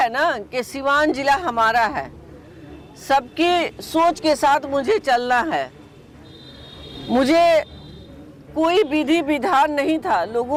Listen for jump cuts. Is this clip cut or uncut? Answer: uncut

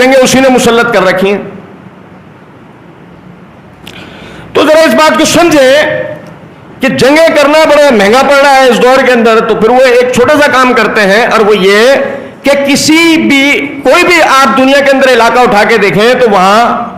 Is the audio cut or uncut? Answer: uncut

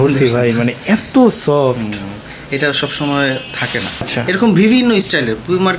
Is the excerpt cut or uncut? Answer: cut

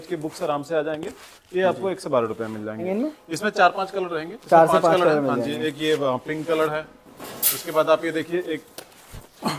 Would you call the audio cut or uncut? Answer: cut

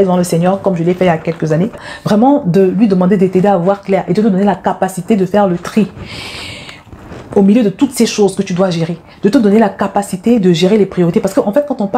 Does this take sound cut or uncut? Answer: cut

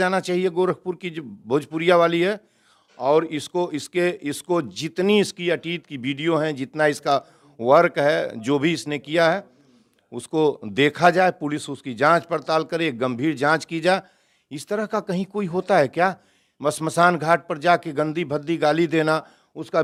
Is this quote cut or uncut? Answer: uncut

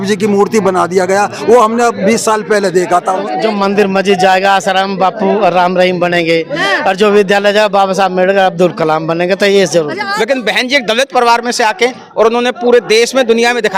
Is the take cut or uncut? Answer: cut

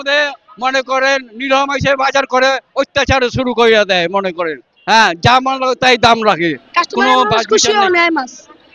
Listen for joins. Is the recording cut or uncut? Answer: cut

